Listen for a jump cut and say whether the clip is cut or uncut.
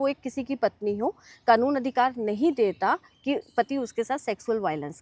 uncut